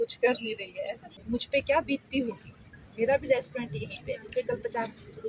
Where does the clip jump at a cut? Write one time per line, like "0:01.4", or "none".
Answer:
0:01.2

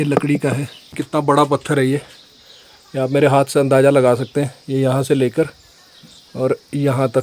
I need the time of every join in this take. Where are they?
0:00.9

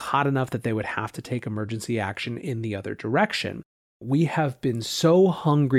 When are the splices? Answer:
0:03.9

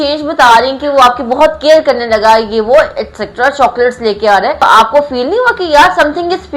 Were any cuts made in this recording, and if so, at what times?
0:04.6

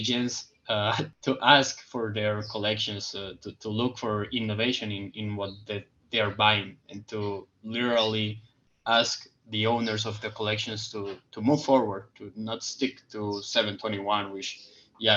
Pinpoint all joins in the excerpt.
0:01.1

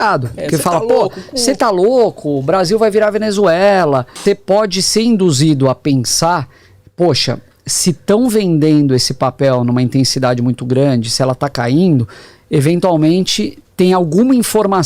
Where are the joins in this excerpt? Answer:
0:04.2

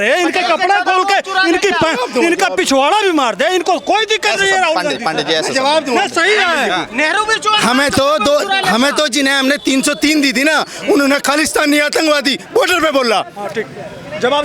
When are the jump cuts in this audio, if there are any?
none

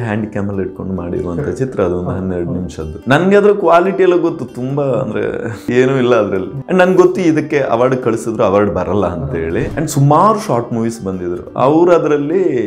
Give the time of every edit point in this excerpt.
0:02.9
0:05.6
0:06.5
0:09.7

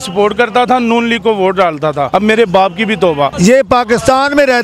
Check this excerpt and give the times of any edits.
0:02.1
0:03.3

